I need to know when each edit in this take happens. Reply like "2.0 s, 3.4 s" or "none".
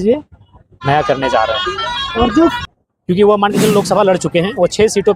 2.6 s